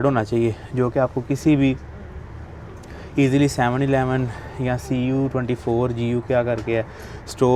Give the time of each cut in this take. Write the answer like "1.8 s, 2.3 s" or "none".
none

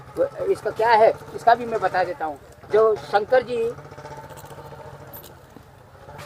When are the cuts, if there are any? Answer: none

